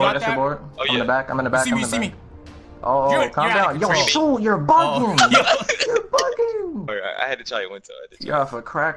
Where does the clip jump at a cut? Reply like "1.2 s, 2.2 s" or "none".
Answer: none